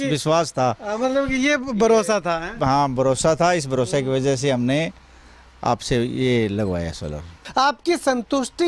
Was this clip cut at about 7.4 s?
yes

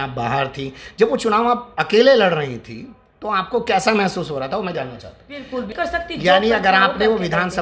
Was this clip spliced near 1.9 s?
no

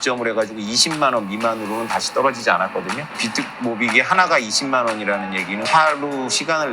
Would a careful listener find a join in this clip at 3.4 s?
no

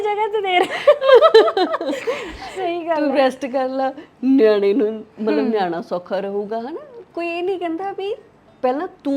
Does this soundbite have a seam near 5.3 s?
no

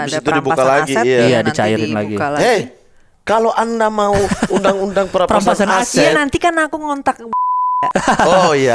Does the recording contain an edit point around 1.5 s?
no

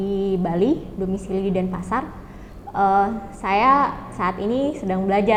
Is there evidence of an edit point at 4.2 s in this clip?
no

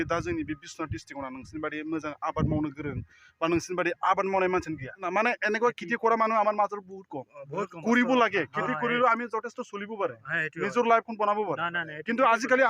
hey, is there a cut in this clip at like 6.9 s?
no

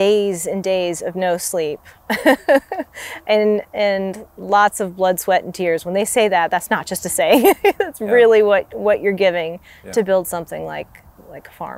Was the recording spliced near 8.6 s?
no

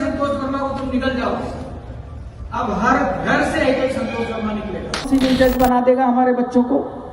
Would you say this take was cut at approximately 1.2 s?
no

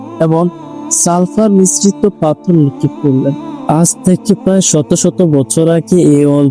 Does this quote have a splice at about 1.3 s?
no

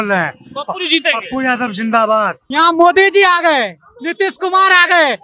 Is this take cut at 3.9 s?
no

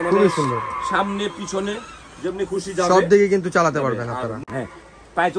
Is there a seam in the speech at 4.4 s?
yes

